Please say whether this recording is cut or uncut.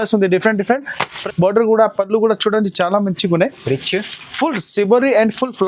cut